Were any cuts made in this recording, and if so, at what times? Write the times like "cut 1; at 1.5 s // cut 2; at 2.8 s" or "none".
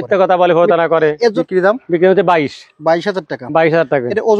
cut 1; at 1.4 s

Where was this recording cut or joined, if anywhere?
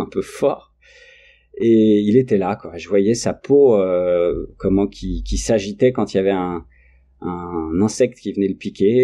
none

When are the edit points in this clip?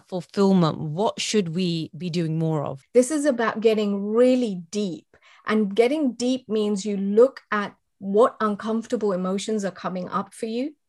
cut 1; at 2.8 s

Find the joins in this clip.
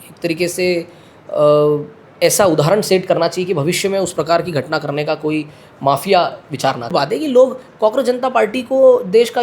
cut 1; at 6.9 s

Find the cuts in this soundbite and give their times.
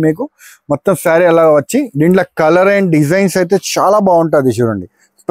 none

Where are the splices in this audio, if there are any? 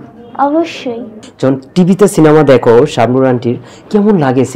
cut 1; at 1.2 s

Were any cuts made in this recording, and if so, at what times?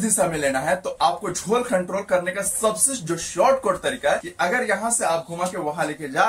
cut 1; at 4.3 s

